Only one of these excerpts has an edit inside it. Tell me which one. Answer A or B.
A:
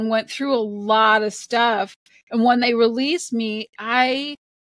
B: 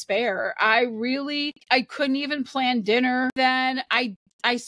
B